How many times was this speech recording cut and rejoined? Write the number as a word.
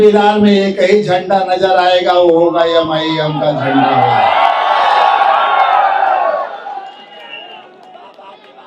zero